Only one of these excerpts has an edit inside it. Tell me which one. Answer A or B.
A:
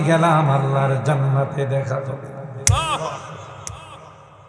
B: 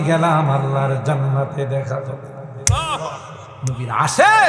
B